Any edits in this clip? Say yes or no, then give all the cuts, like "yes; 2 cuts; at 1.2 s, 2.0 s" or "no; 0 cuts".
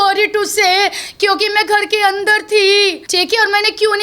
yes; 1 cut; at 3.0 s